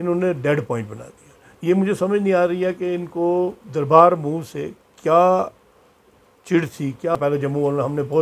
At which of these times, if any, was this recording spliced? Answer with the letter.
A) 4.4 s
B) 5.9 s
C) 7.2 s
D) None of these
C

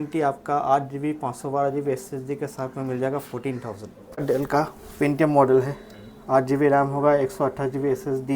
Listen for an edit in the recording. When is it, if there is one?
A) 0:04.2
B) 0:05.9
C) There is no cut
A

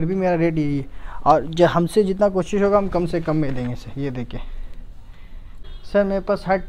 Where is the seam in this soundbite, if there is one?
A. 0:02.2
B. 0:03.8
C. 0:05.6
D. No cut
C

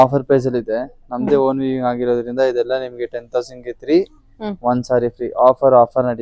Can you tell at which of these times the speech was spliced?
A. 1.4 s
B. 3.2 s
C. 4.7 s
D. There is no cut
D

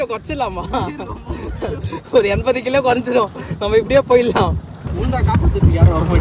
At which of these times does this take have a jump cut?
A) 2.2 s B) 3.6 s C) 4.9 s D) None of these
C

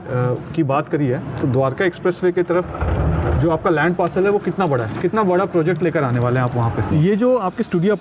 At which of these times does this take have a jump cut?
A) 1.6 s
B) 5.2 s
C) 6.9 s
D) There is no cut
C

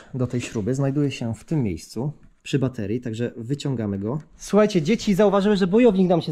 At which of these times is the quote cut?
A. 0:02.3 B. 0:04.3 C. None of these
B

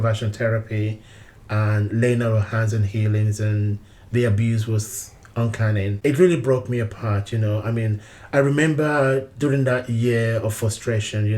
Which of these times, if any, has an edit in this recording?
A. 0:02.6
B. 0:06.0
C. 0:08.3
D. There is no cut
B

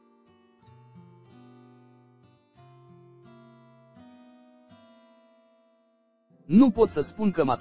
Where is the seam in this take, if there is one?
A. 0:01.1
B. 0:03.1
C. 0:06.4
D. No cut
D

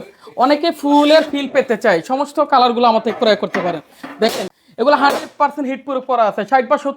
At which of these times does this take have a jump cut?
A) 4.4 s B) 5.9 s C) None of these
A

